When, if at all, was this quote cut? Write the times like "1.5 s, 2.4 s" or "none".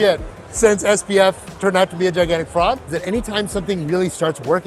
2.9 s